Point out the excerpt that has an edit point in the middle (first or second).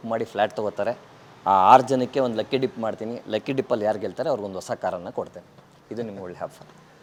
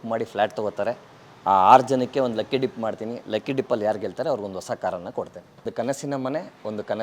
second